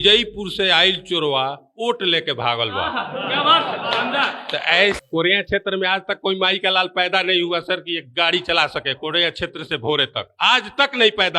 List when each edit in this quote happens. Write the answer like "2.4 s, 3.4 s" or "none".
5.0 s